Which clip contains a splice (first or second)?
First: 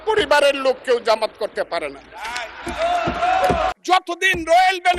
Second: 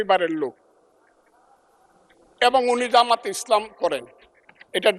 first